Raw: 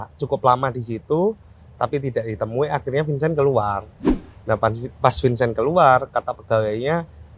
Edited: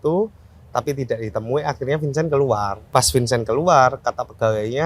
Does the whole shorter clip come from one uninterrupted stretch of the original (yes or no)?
no